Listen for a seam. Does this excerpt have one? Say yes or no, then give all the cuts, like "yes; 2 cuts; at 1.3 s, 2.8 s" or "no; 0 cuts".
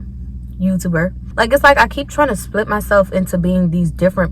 yes; 1 cut; at 1.2 s